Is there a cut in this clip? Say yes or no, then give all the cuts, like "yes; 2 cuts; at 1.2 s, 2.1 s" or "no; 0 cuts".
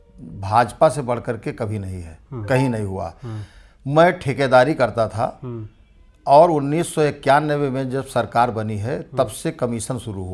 no; 0 cuts